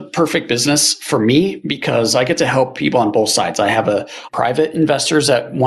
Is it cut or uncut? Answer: uncut